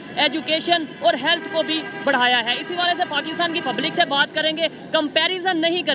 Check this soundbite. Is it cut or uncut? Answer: uncut